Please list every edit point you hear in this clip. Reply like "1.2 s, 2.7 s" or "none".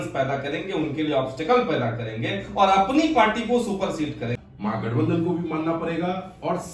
4.4 s